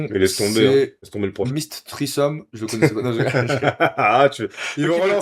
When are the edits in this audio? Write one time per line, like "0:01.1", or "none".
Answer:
0:01.5